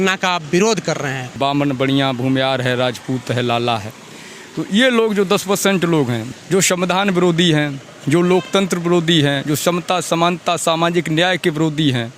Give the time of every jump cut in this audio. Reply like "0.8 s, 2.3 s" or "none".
1.2 s, 6.3 s